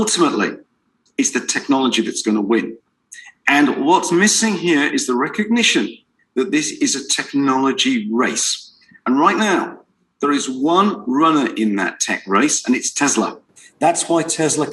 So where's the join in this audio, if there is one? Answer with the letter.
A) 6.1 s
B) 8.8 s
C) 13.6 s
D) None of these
D